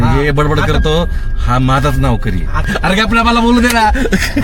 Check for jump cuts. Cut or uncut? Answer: cut